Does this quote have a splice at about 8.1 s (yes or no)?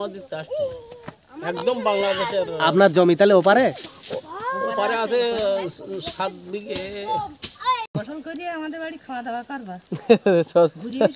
yes